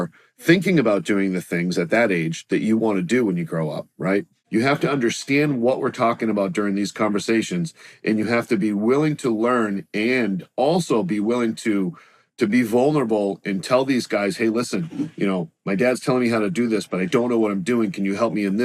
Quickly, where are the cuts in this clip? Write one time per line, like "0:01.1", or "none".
0:04.4